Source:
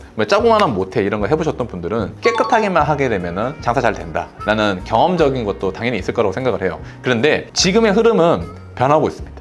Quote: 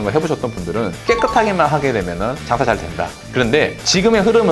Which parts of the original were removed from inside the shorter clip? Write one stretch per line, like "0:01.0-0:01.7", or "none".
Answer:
0:04.3-0:06.9